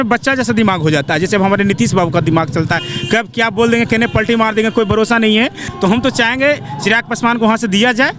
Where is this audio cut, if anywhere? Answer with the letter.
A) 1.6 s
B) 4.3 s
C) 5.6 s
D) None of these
C